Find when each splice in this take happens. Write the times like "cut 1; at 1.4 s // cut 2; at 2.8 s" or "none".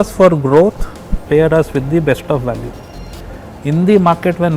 cut 1; at 1.2 s